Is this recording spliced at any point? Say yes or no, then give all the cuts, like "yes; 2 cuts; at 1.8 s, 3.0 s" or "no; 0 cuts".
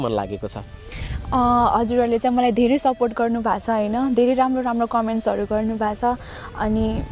no; 0 cuts